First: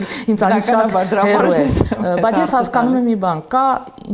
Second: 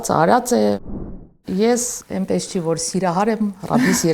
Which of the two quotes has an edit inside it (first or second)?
second